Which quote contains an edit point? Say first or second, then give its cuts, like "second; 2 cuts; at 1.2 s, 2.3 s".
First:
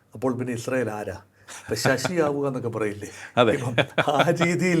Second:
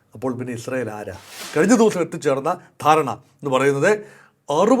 second; 1 cut; at 1.4 s